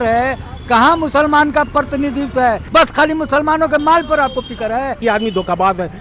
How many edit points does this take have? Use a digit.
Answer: 2